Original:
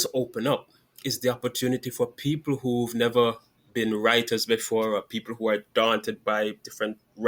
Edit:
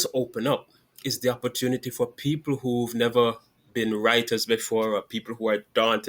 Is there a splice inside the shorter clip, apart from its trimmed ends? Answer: no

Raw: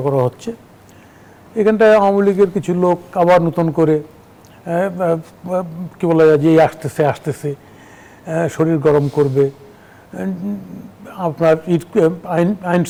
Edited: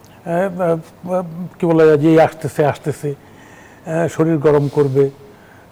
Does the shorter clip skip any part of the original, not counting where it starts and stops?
no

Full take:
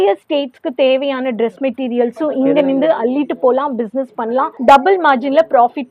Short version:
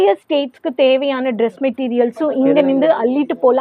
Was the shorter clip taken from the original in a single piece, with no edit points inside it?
yes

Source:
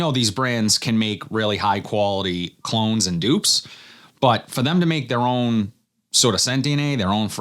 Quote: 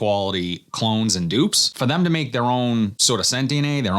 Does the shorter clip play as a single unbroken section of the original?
no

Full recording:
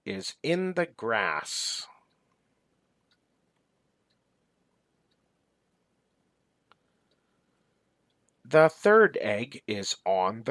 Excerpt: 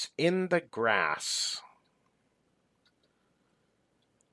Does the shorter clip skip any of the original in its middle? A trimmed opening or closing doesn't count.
yes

